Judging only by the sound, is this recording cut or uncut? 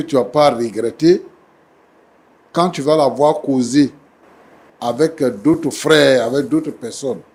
uncut